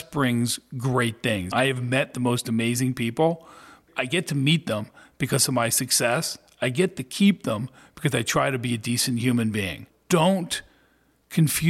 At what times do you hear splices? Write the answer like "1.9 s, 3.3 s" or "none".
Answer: 1.5 s, 3.8 s, 9.9 s

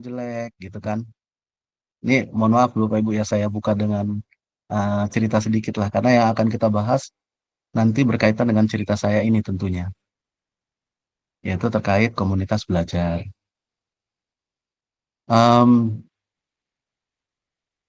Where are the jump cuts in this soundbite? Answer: none

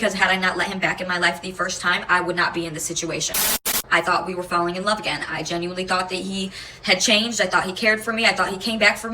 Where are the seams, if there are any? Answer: 3.7 s

